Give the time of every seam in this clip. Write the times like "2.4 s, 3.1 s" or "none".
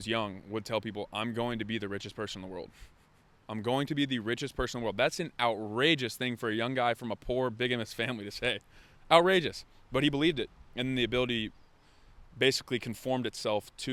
none